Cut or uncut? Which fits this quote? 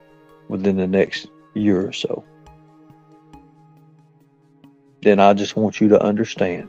cut